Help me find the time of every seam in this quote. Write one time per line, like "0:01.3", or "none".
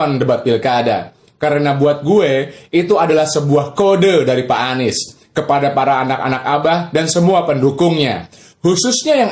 none